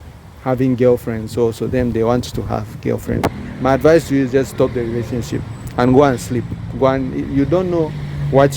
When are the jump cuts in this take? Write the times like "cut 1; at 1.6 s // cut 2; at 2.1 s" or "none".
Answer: cut 1; at 3.3 s